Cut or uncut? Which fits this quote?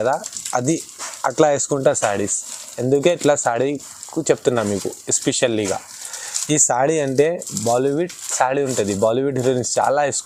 uncut